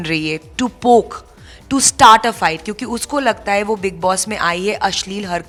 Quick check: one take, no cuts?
yes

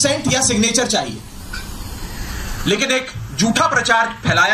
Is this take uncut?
yes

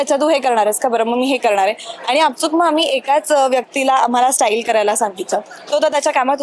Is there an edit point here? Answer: no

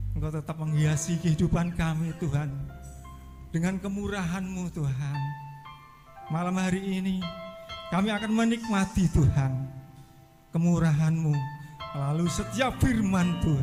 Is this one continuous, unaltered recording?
yes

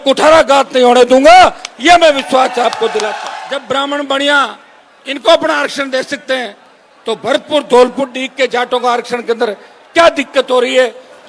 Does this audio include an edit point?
yes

